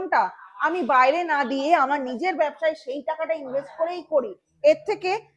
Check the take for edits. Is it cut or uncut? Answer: uncut